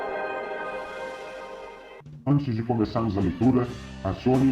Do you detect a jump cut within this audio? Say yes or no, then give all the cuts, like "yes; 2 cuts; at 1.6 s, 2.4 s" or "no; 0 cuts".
yes; 1 cut; at 1.0 s